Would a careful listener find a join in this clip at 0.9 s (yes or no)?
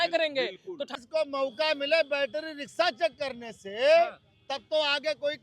yes